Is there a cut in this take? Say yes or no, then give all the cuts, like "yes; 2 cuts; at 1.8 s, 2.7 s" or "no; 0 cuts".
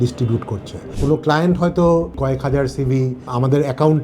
yes; 2 cuts; at 0.9 s, 2.2 s